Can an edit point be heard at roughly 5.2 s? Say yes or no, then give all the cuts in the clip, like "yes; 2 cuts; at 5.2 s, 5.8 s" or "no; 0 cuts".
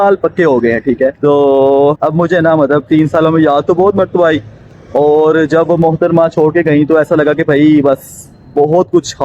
no; 2 cuts; at 1.2 s, 2.0 s